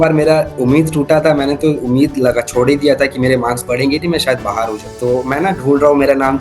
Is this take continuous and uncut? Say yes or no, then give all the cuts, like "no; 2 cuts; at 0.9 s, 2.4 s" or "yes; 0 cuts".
no; 1 cut; at 4.8 s